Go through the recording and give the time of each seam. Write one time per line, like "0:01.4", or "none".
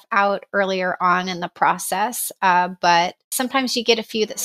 0:03.3